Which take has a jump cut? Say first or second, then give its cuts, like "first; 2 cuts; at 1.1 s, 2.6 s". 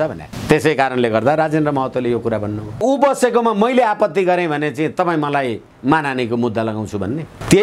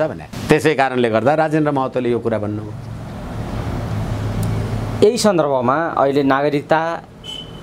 first; 1 cut; at 2.8 s